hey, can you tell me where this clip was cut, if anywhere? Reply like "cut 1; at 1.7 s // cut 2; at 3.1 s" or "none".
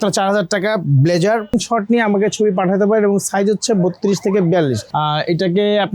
cut 1; at 1.5 s // cut 2; at 4.8 s